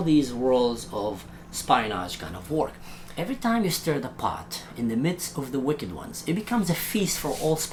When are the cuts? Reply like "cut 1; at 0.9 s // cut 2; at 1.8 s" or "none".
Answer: none